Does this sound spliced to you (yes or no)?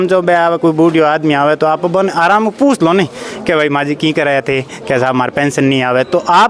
no